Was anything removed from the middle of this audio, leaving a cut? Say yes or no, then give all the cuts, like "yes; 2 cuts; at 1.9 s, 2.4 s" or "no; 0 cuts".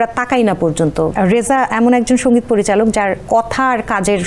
yes; 2 cuts; at 1.1 s, 3.2 s